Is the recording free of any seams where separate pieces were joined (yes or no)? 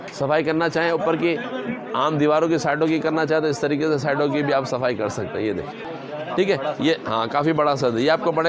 no